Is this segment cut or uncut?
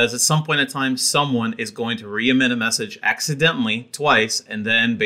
uncut